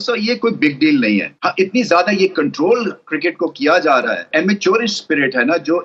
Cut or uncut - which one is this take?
cut